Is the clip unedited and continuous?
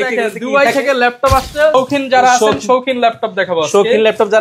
no; 1 cut; at 1.7 s

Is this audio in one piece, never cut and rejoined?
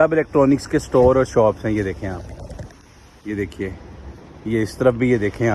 yes; 0 cuts

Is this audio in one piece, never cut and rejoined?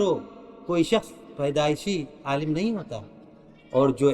no; 1 cut; at 1.2 s

